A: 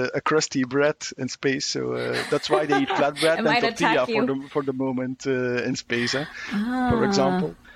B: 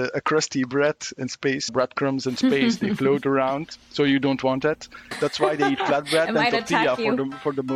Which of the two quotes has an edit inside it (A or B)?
B